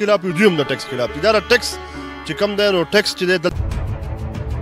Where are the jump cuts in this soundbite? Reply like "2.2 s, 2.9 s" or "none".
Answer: 3.5 s